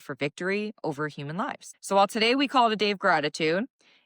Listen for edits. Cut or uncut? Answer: cut